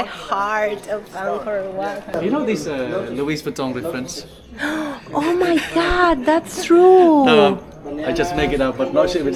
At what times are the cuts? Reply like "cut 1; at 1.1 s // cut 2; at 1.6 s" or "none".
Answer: cut 1; at 2.1 s